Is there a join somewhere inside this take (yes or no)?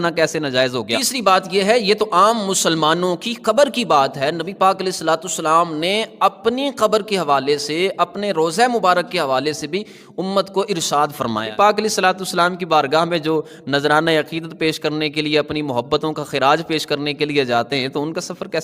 yes